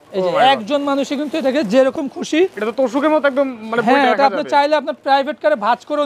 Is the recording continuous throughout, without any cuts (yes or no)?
yes